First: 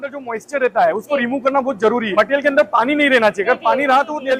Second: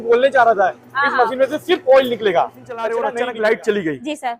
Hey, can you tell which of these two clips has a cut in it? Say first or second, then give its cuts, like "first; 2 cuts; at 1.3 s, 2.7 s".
second; 1 cut; at 3.0 s